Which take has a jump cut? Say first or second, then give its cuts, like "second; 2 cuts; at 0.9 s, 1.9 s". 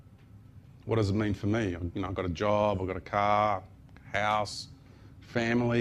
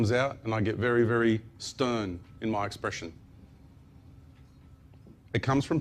second; 1 cut; at 3.1 s